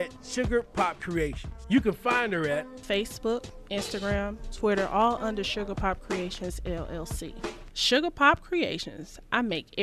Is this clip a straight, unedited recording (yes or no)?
yes